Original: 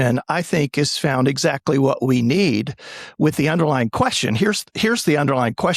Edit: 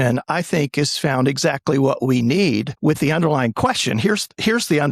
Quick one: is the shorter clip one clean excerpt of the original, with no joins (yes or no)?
no